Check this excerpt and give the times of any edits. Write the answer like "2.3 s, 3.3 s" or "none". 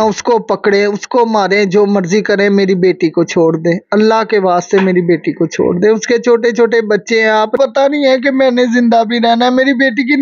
7.6 s